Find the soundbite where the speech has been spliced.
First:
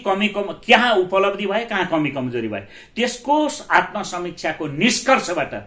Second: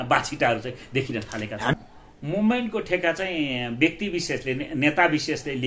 second; 1 cut; at 1.7 s

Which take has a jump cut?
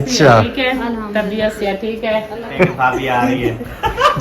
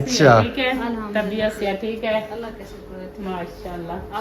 first; 1 cut; at 2.5 s

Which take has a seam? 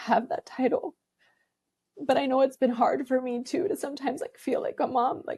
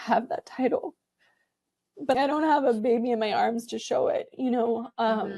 second; 1 cut; at 2.1 s

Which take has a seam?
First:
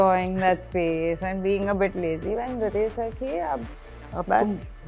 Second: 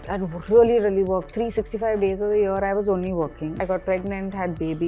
second; 1 cut; at 3.5 s

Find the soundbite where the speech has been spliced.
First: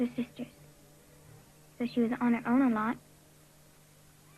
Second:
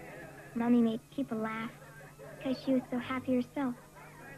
second; 1 cut; at 2.1 s

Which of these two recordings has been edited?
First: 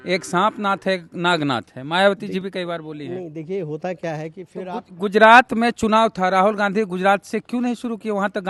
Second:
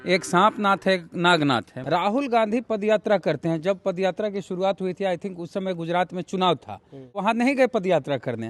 second; 2 cuts; at 1.7 s, 7.2 s

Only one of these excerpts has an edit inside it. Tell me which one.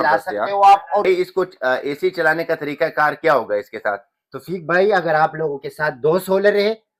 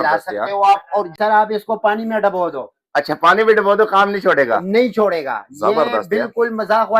second; 1 cut; at 1.0 s

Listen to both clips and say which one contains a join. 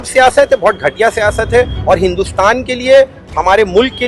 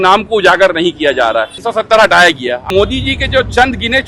second; 2 cuts; at 1.6 s, 2.7 s

